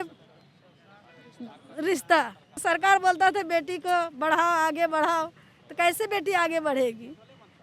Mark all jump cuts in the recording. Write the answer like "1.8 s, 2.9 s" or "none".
2.6 s